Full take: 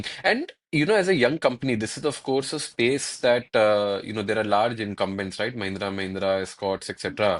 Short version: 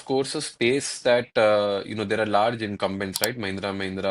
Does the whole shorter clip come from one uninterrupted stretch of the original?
yes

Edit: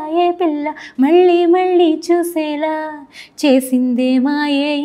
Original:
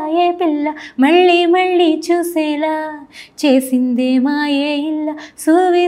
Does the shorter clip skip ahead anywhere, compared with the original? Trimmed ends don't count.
no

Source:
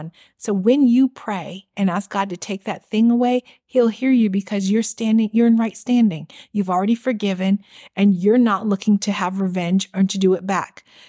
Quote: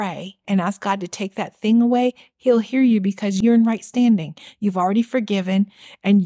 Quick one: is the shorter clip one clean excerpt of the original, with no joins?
no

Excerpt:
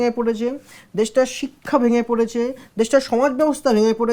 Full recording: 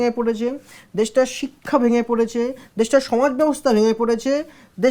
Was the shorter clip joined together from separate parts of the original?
no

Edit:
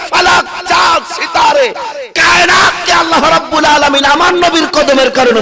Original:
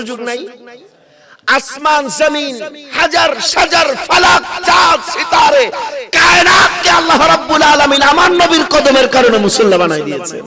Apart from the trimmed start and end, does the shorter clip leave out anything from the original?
no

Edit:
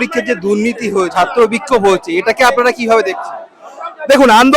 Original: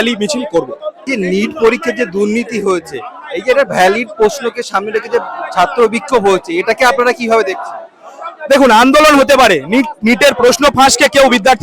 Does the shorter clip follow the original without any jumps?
no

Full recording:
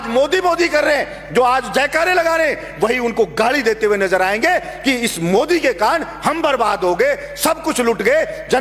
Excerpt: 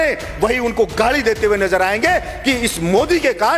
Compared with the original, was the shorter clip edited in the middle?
no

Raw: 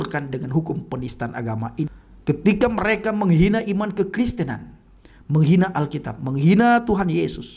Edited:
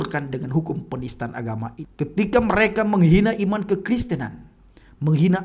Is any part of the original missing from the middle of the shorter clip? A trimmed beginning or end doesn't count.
yes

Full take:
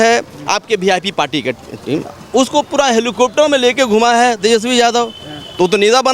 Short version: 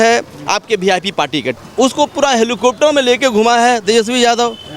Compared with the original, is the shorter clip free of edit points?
no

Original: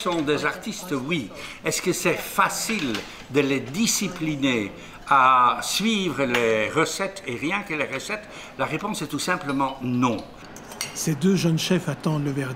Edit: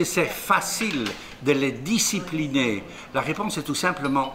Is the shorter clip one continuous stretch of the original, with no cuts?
no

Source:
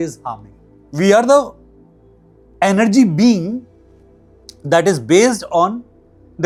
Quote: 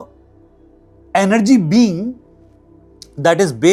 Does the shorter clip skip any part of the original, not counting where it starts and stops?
no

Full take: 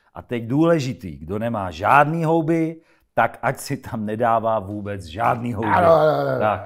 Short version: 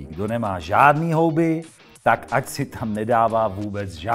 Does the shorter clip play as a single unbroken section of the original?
yes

